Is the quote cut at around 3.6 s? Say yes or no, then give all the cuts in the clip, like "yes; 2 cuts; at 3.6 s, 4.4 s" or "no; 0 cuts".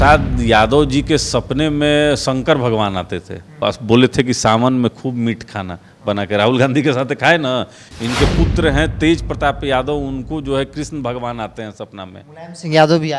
yes; 1 cut; at 3.6 s